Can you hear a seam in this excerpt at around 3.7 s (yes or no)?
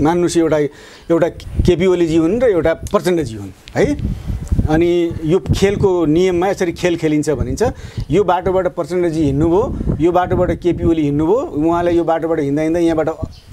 no